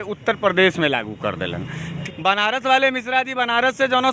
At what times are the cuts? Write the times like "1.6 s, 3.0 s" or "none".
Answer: 2.0 s

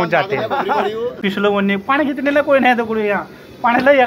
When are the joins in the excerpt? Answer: 1.1 s

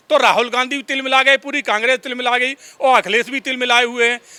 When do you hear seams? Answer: none

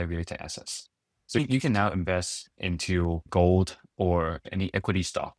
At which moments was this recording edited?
1.4 s, 3.3 s, 4.4 s

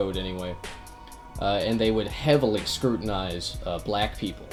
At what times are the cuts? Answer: none

